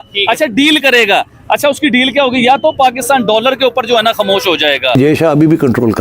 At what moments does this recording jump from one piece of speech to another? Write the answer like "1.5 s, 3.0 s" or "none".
5.0 s